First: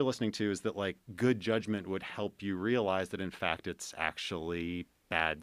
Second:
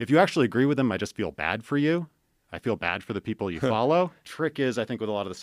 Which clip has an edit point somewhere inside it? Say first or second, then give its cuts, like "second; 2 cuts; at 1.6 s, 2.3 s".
second; 1 cut; at 4.2 s